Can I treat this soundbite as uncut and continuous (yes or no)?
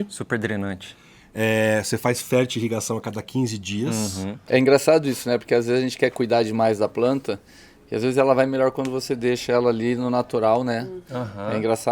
no